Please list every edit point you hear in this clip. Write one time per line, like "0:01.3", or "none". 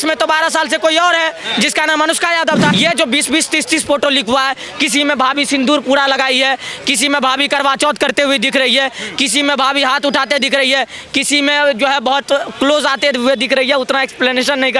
0:02.7